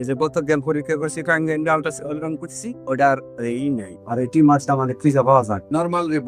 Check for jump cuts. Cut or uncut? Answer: uncut